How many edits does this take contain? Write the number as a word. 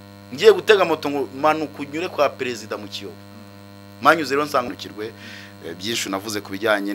one